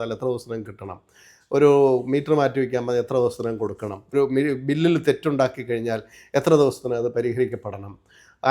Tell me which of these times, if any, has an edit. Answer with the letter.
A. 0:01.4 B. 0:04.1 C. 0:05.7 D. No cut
B